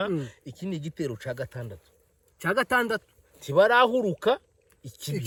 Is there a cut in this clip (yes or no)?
no